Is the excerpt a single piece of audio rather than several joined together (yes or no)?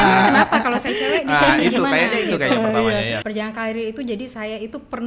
no